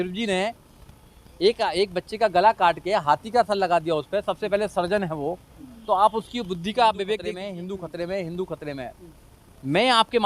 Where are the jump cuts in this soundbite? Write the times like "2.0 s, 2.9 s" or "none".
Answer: 7.4 s

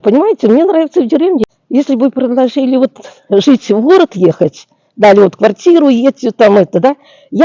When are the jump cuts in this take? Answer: 1.4 s

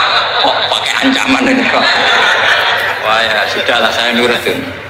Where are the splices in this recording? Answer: none

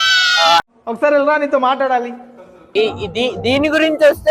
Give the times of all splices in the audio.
2.7 s

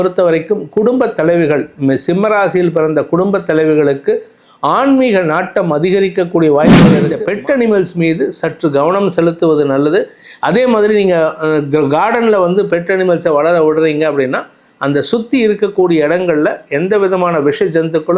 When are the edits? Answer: 7.1 s

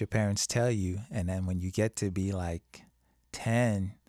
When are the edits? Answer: none

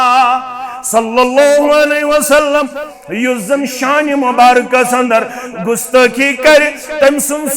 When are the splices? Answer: 2.9 s

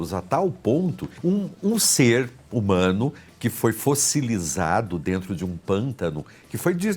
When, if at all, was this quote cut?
1.1 s

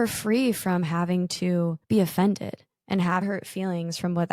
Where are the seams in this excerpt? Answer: 1.8 s, 3.2 s

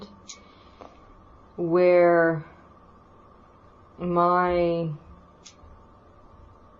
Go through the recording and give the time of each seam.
3.4 s

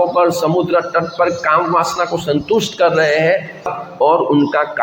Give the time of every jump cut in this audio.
3.8 s

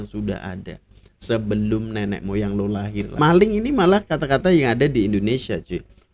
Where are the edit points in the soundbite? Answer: 3.1 s

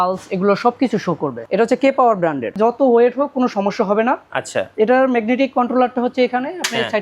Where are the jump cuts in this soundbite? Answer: 1.4 s, 2.5 s

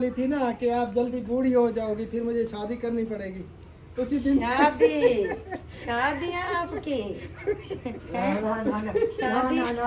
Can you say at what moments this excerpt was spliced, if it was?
none

